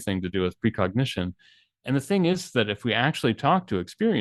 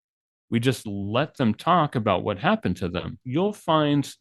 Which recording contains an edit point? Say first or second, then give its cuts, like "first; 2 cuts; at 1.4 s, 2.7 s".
second; 1 cut; at 3.2 s